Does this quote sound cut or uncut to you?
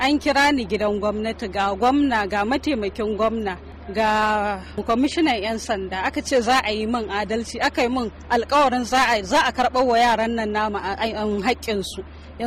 uncut